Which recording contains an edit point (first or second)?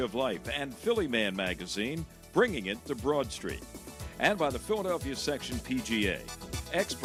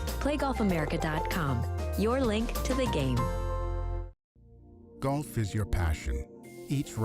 second